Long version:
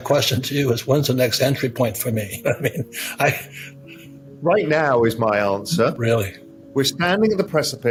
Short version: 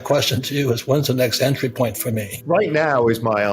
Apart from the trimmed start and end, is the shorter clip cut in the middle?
yes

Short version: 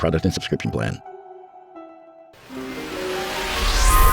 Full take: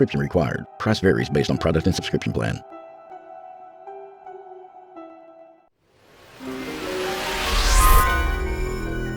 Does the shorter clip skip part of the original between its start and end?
yes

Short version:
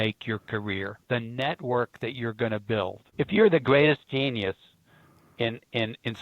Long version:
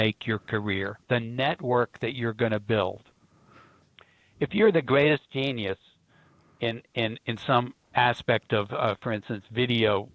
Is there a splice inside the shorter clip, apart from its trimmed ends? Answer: yes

